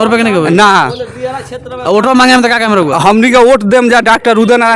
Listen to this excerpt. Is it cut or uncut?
uncut